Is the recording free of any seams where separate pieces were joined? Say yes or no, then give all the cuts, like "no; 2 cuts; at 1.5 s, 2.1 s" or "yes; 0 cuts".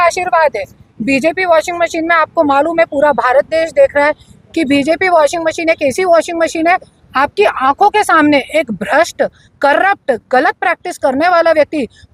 yes; 0 cuts